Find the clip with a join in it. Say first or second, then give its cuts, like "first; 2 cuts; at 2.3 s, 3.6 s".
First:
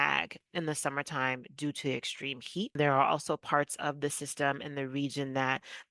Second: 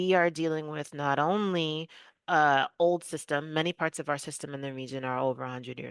first; 1 cut; at 2.7 s